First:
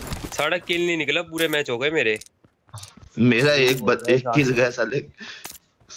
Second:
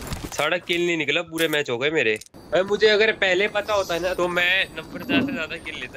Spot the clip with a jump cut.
second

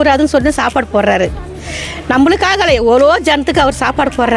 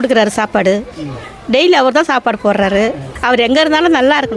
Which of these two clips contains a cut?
second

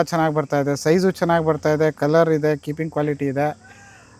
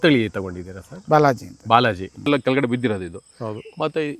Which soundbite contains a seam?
second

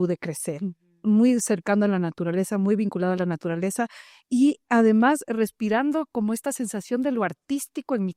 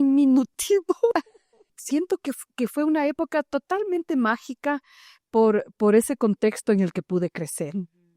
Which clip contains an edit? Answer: second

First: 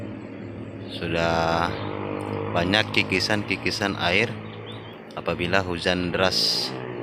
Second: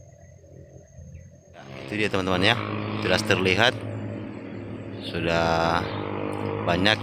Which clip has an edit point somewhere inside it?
second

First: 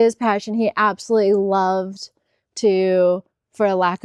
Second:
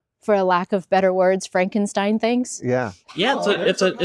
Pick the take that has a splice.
second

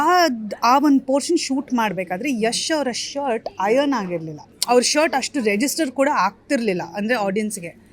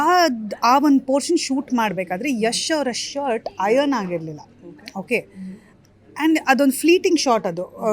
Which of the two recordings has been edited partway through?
first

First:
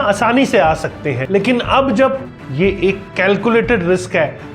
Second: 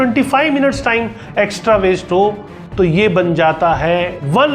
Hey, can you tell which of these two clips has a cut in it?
first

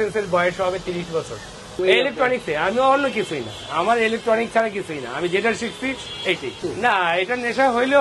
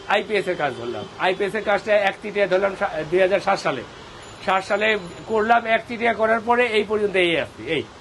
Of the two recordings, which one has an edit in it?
first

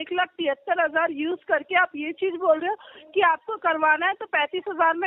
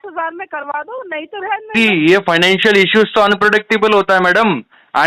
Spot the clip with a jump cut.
second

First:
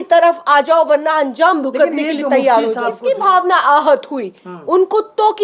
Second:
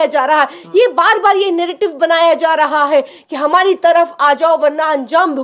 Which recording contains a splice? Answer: first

